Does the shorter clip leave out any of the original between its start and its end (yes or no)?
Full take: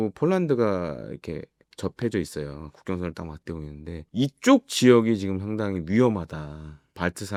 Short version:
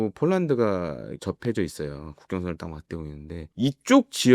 yes